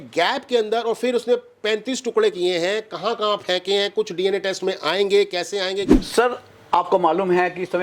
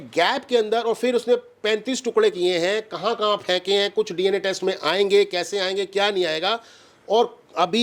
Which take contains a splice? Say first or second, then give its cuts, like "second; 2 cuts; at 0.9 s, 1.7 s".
first; 1 cut; at 5.9 s